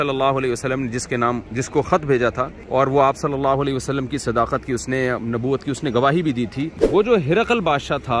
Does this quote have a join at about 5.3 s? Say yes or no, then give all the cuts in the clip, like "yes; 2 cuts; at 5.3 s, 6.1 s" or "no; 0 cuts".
no; 3 cuts; at 1.5 s, 2.5 s, 6.8 s